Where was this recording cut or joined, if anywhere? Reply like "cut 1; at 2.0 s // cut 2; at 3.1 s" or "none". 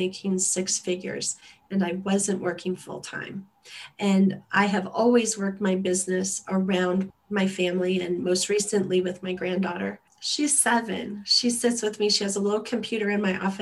cut 1; at 7.1 s // cut 2; at 10.2 s